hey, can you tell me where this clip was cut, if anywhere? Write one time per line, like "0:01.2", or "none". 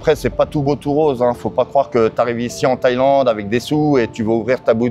none